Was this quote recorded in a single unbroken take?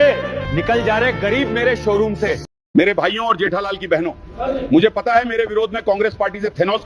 no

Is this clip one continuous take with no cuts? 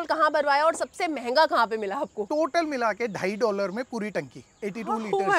no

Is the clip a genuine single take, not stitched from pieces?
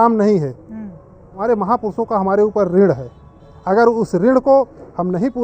no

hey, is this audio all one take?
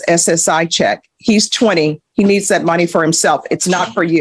yes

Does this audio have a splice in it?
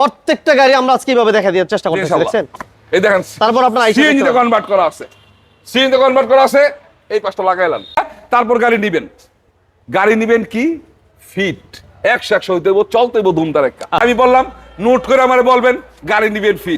yes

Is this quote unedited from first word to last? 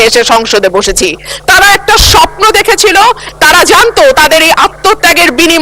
no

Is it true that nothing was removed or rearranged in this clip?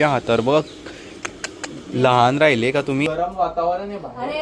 no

